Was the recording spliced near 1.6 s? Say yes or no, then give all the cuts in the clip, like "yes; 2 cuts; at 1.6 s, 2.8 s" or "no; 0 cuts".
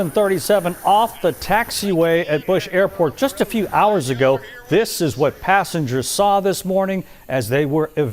no; 1 cut; at 3.4 s